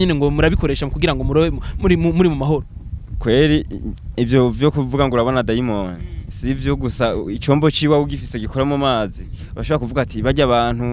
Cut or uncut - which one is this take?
uncut